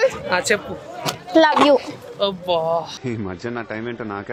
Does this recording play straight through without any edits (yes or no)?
yes